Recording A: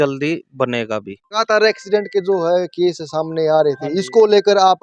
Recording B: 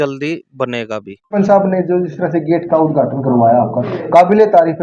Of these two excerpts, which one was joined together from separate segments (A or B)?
B